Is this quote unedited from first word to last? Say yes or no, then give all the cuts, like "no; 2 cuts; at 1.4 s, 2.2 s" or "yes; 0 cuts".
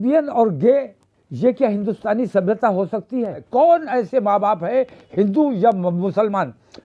no; 1 cut; at 3.4 s